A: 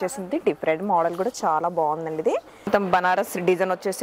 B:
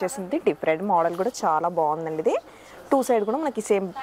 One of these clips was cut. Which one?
A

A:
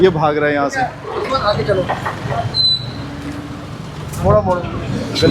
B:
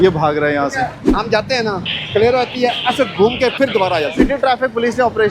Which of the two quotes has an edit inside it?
B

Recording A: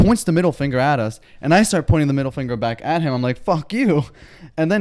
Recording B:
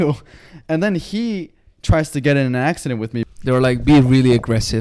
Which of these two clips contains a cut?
B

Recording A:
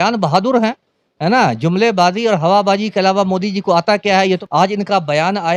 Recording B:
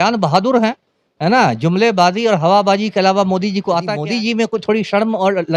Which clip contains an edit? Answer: B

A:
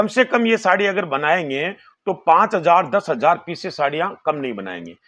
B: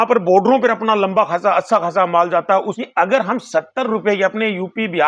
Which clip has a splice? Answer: B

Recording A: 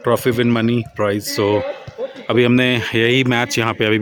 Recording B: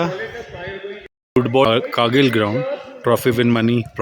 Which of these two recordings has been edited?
B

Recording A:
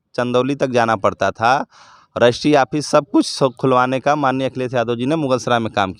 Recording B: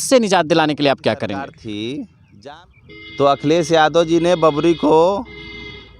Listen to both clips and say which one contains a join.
B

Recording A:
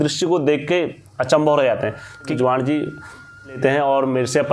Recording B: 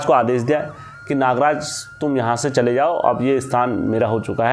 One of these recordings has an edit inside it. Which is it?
A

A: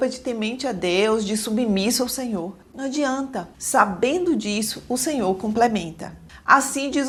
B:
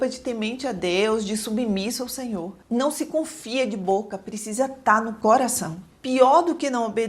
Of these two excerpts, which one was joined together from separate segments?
B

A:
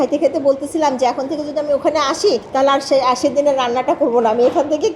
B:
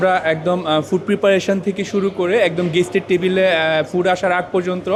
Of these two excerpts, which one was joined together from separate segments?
A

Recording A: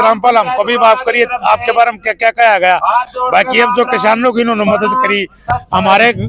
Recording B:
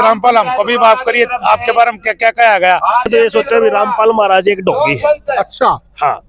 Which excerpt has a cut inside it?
B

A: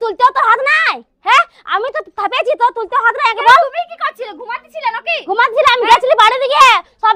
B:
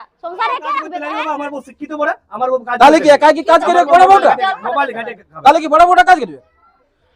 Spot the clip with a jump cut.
B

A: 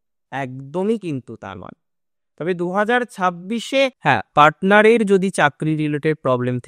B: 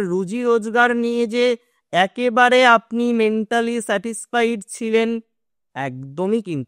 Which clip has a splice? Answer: A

